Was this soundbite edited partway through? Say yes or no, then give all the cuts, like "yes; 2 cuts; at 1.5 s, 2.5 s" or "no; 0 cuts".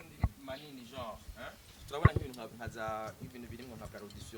no; 0 cuts